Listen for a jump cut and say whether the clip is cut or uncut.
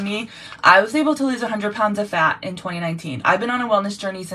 uncut